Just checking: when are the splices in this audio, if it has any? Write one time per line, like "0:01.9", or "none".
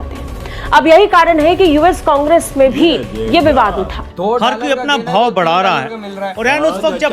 0:04.1